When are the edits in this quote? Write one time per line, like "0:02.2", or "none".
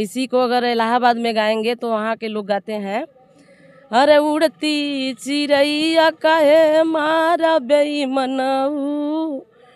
none